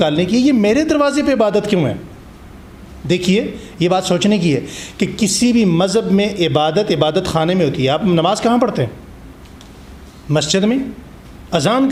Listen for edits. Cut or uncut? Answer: uncut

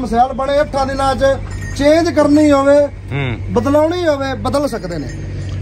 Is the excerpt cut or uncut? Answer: uncut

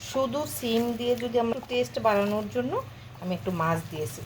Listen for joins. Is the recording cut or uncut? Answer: cut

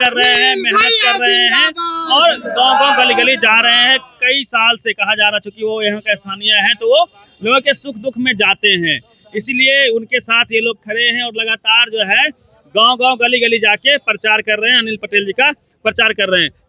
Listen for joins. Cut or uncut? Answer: uncut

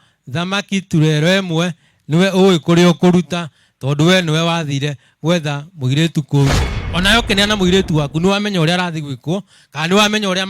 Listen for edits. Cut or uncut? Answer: cut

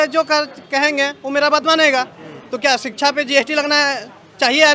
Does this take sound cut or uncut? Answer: uncut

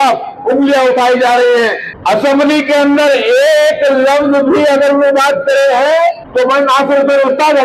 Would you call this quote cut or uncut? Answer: cut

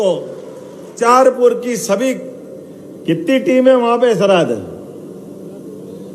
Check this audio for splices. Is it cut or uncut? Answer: cut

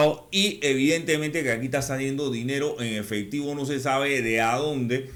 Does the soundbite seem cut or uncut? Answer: uncut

